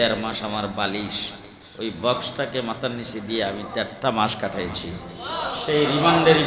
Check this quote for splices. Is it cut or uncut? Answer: uncut